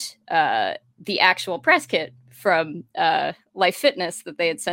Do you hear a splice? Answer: no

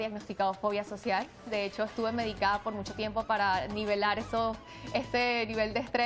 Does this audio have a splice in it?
no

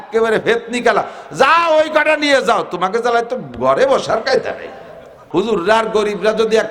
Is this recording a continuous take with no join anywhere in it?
no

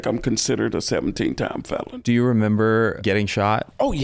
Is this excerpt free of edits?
no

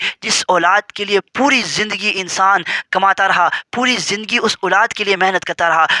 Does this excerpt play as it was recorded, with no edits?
yes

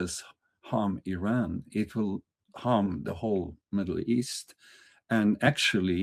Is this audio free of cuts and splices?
yes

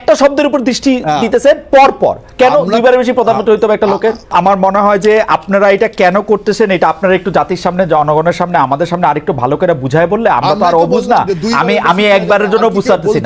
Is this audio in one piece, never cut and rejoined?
no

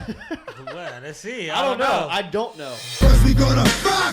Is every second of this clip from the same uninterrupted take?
no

